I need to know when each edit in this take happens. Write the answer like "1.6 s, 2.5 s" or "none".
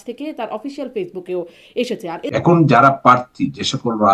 2.3 s

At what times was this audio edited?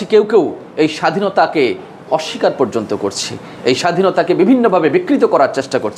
none

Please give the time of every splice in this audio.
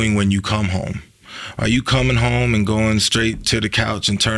none

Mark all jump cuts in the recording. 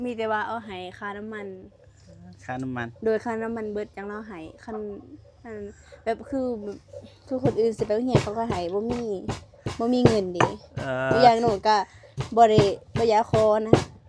none

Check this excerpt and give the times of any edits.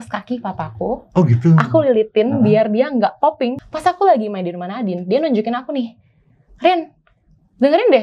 3.7 s

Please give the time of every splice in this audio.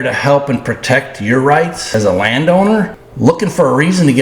1.9 s, 3.0 s

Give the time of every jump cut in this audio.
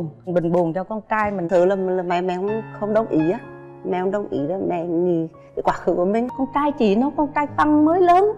1.4 s, 6.3 s

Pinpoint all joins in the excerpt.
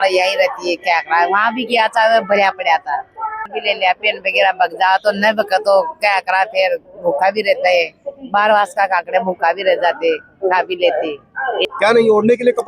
3.5 s, 11.6 s

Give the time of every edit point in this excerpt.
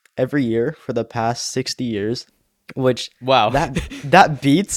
2.3 s

